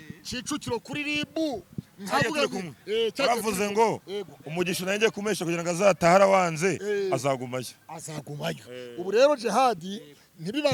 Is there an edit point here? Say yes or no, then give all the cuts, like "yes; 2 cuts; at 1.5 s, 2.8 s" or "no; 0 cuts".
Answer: no; 0 cuts